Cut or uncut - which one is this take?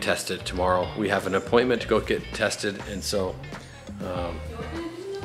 uncut